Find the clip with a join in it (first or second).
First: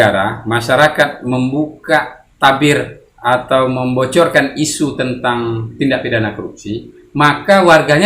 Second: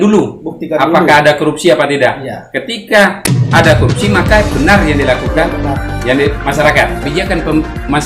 second